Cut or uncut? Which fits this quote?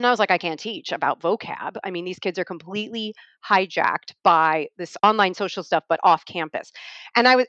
cut